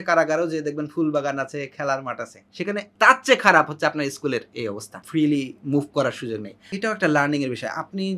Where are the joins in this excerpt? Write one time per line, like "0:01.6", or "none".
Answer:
0:02.6
0:05.0
0:06.7